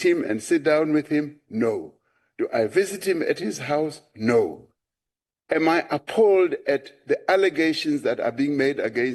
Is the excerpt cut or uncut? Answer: uncut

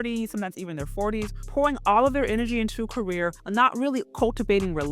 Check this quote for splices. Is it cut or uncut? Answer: cut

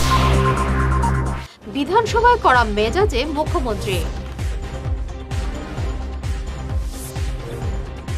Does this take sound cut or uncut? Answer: cut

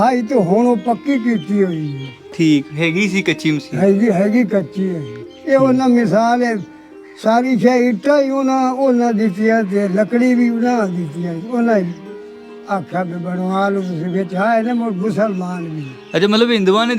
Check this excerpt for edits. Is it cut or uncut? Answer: uncut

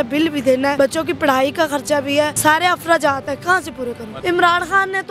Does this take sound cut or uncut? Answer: cut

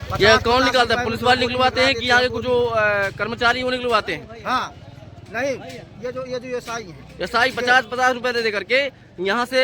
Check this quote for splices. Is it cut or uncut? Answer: uncut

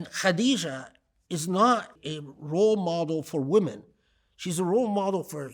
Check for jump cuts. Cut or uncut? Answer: cut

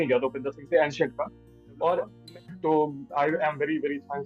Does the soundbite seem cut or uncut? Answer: cut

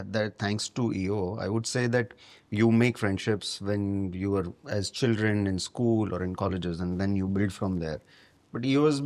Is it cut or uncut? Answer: uncut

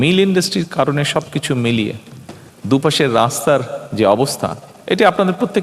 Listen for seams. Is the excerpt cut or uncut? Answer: uncut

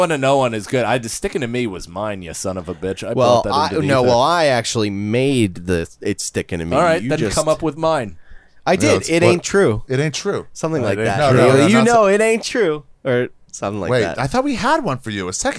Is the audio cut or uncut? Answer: uncut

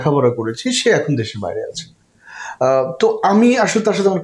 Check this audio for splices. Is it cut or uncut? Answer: uncut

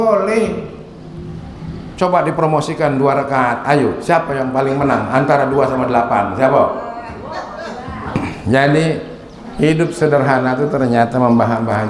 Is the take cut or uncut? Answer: cut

